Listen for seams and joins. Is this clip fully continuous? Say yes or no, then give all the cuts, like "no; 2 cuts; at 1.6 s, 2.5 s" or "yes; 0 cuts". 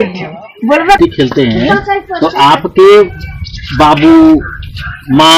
no; 1 cut; at 1.0 s